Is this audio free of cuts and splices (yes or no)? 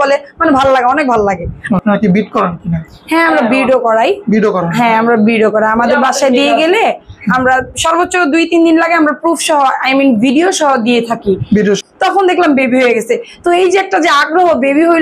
no